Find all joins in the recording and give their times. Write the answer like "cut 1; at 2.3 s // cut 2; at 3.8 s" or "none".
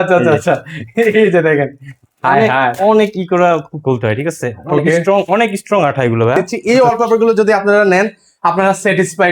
cut 1; at 6.5 s

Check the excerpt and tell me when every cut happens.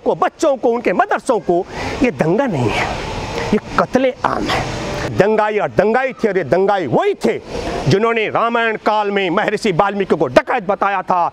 cut 1; at 5.1 s

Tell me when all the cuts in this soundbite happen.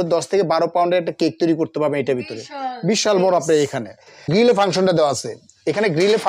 cut 1; at 4.3 s

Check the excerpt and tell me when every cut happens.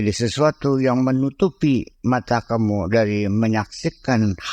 none

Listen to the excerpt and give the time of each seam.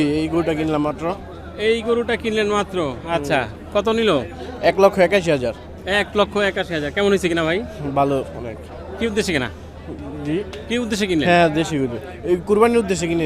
none

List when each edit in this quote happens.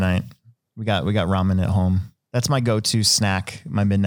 cut 1; at 2.1 s

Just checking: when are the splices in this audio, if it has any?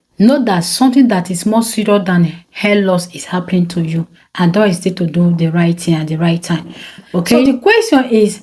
cut 1; at 7.5 s

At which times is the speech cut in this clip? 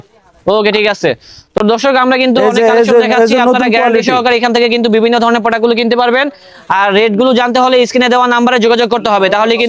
none

